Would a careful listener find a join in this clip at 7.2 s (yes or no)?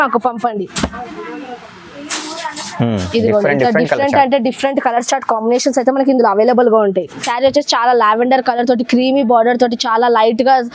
yes